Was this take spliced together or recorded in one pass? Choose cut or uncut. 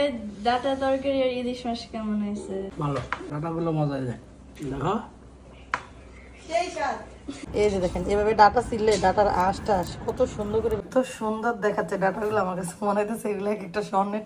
cut